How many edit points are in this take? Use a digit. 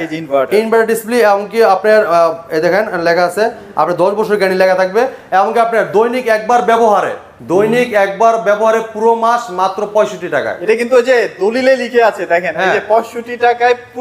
0